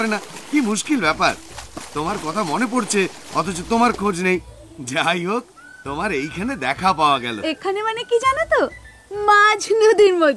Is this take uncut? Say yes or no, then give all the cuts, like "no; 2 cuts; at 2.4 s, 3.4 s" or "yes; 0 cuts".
yes; 0 cuts